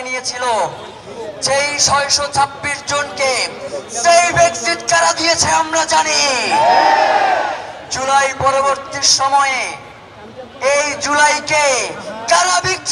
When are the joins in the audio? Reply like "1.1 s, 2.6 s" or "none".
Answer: none